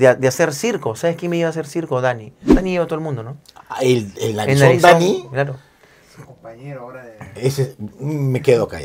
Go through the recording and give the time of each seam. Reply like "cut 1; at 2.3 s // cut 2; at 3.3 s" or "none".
none

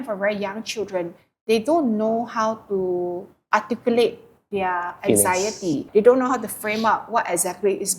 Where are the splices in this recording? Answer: cut 1; at 5.9 s

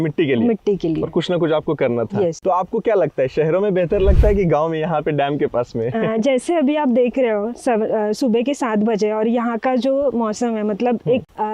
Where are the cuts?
none

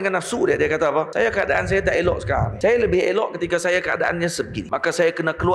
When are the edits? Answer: cut 1; at 1.1 s // cut 2; at 2.5 s // cut 3; at 4.6 s

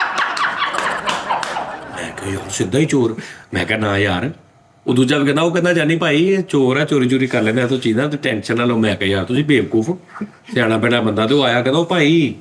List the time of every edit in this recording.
cut 1; at 1.8 s

